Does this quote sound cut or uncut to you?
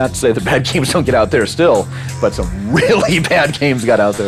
uncut